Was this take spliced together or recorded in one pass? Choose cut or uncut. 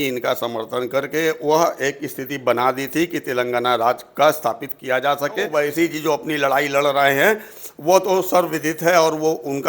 cut